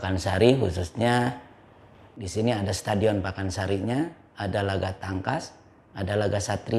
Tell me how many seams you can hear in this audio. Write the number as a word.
zero